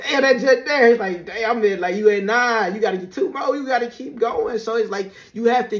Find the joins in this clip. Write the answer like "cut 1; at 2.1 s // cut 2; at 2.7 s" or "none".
none